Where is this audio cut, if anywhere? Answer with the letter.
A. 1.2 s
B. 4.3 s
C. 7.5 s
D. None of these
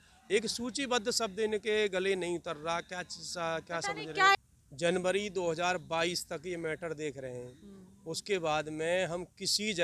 B